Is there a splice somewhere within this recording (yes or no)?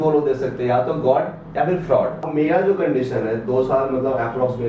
yes